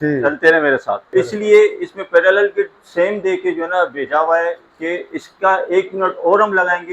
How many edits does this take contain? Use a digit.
1